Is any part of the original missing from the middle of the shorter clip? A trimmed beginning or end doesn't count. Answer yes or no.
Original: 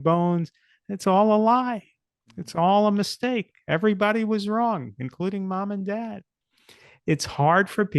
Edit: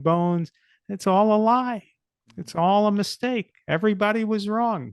no